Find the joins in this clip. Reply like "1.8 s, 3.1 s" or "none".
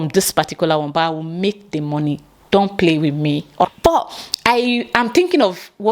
3.6 s